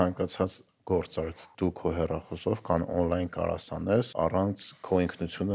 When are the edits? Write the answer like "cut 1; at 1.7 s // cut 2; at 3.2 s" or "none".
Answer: cut 1; at 1.5 s // cut 2; at 4.1 s